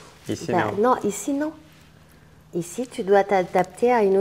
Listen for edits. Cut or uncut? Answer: uncut